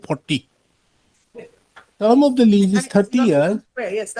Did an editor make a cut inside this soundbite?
yes; 1 cut; at 2.0 s

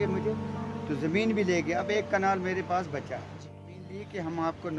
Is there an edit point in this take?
yes; 1 cut; at 3.8 s

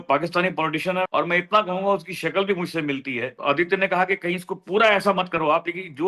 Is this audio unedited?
no; 2 cuts; at 1.1 s, 3.3 s

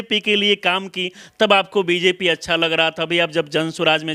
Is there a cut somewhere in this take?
no; 0 cuts

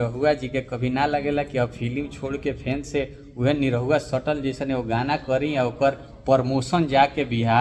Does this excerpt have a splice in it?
no; 0 cuts

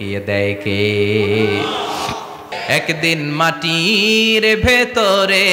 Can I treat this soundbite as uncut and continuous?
no; 1 cut; at 2.5 s

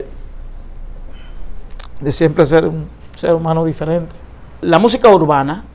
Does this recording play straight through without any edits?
no; 1 cut; at 4.6 s

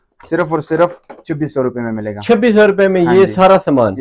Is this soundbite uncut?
yes; 0 cuts

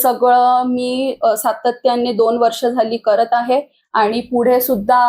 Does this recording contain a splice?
no; 0 cuts

